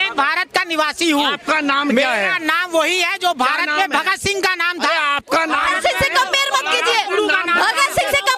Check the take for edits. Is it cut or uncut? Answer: uncut